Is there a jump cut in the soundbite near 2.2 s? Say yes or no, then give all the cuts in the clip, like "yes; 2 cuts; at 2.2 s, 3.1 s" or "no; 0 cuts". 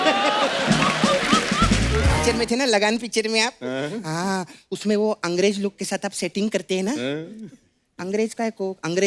yes; 1 cut; at 2.2 s